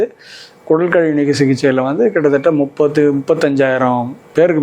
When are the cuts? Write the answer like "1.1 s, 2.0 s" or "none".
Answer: none